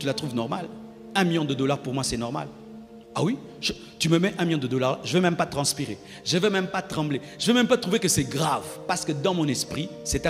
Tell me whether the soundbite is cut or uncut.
uncut